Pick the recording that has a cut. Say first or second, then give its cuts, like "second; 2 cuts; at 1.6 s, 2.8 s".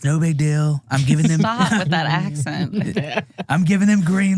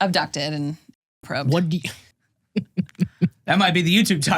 second; 1 cut; at 2.0 s